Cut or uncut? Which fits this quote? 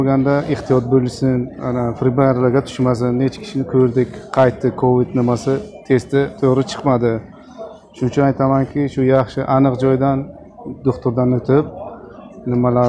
uncut